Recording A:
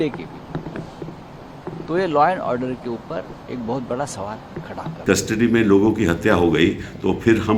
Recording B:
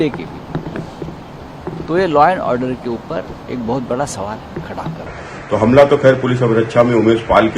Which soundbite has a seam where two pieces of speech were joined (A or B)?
B